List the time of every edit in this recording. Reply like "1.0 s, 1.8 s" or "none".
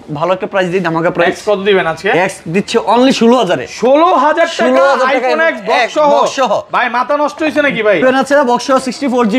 8.0 s